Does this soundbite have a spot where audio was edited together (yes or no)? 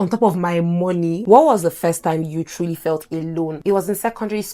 yes